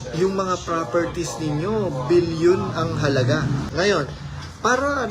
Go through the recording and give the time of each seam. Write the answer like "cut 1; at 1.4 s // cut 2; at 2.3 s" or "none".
cut 1; at 3.7 s